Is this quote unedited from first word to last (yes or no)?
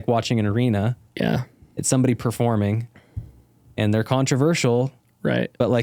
yes